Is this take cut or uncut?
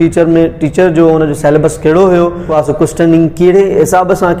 cut